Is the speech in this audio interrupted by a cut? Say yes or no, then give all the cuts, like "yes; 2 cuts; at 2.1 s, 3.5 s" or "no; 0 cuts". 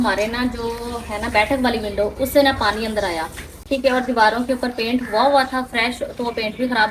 no; 0 cuts